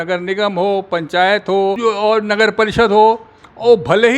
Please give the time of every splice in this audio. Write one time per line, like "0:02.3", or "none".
0:01.8